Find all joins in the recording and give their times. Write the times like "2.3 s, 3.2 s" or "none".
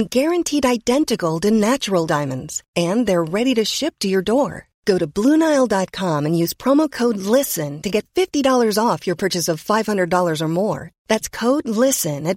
none